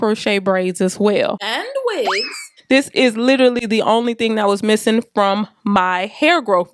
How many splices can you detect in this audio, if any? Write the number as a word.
one